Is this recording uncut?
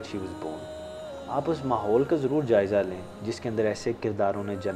yes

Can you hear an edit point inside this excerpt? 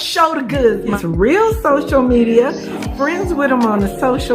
yes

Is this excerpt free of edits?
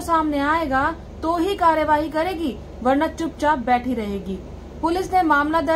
yes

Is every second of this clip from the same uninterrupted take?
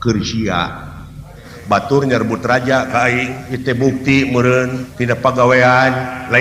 no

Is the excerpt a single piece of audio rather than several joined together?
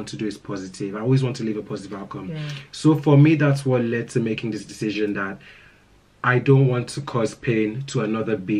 yes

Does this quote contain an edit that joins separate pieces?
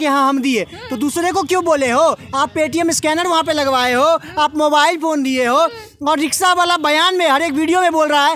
no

